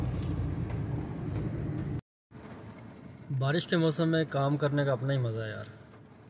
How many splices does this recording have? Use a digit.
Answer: 1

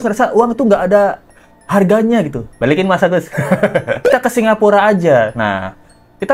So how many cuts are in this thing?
1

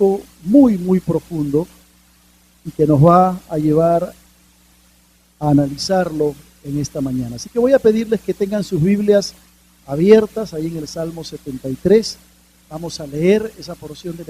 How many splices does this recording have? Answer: 1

